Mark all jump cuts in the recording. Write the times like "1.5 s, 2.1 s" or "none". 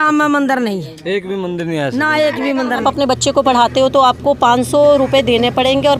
2.8 s

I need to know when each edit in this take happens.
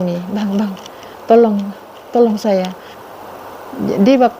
2.9 s

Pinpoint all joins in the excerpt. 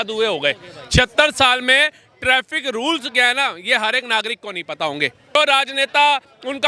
5.4 s

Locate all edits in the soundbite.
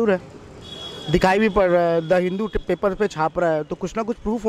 none

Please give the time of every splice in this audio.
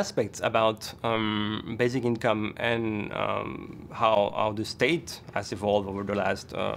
none

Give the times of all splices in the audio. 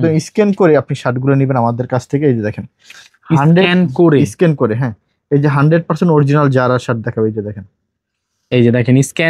none

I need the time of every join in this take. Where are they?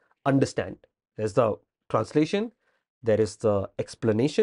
1.1 s

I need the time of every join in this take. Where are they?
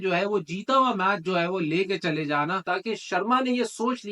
2.6 s

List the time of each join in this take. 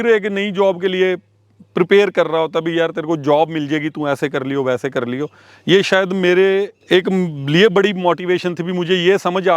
none

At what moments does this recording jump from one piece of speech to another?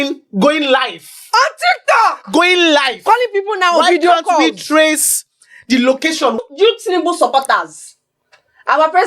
6.4 s

